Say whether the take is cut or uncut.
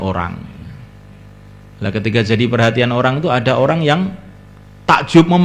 uncut